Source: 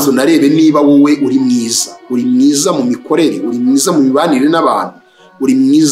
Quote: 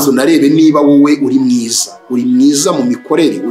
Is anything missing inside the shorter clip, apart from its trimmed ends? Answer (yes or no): no